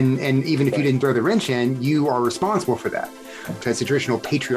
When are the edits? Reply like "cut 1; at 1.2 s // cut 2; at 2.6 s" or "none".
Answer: cut 1; at 3.6 s